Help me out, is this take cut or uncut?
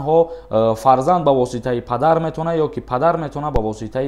uncut